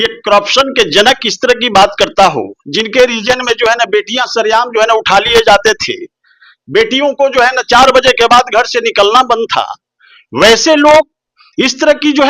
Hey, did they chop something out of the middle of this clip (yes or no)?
no